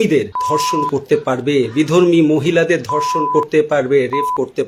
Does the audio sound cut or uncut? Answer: uncut